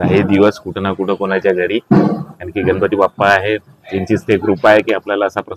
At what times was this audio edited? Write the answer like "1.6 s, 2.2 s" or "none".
none